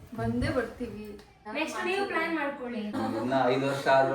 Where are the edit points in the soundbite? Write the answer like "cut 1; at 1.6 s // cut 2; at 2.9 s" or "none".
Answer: cut 1; at 1.3 s // cut 2; at 3.0 s